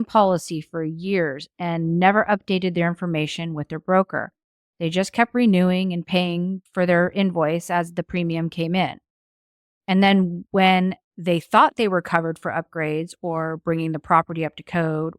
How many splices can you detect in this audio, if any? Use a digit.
2